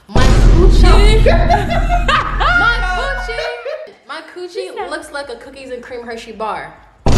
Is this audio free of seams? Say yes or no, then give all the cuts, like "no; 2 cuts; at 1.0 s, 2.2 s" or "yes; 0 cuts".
yes; 0 cuts